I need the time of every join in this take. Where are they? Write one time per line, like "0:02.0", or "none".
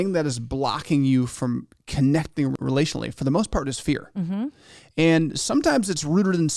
0:02.6